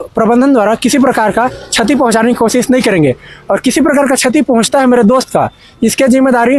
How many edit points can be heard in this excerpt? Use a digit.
0